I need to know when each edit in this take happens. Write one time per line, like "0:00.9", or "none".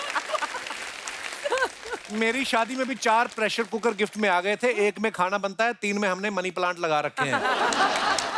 none